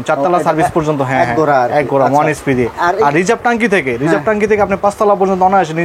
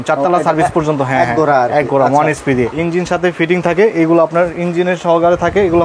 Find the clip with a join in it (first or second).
second